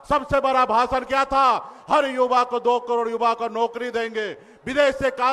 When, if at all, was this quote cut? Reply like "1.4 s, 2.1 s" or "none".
none